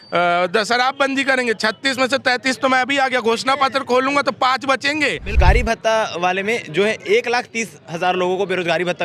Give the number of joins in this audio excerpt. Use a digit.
1